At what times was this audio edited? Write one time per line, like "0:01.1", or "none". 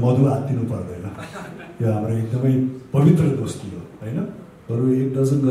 0:04.5